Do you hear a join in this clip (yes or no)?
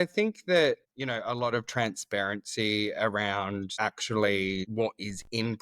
yes